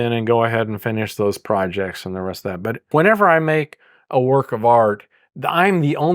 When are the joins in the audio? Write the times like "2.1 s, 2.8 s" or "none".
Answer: 2.8 s